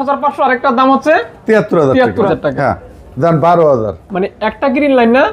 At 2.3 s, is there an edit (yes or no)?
yes